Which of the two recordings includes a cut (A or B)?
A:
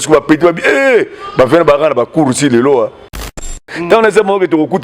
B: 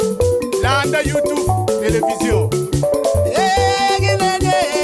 A